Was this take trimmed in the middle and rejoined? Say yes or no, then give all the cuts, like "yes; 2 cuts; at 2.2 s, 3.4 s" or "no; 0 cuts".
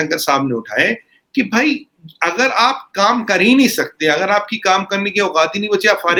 no; 0 cuts